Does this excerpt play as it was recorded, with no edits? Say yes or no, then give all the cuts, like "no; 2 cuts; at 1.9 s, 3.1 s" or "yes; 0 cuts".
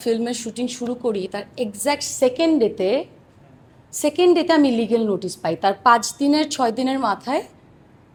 yes; 0 cuts